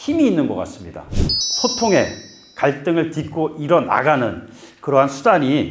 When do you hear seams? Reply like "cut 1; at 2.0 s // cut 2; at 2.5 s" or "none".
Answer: cut 1; at 1.2 s